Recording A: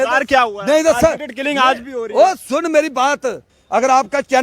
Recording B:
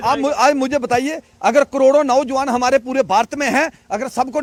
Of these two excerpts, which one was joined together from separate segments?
A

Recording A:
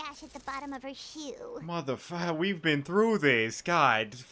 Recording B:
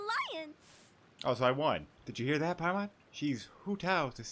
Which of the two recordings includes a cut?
B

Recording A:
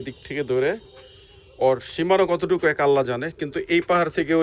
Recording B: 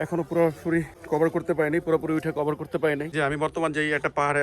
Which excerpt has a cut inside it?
B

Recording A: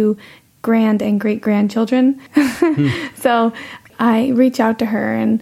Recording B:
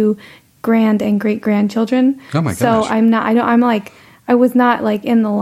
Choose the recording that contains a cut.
A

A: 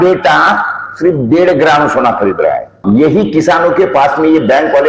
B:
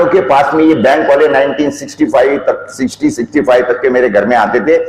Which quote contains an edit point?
A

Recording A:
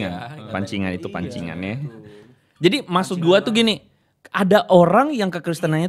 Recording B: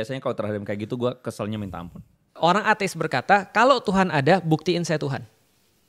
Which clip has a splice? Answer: B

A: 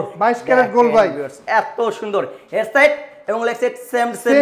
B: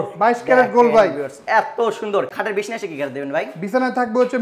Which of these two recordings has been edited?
B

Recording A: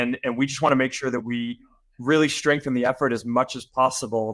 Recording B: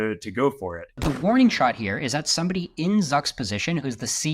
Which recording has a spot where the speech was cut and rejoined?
B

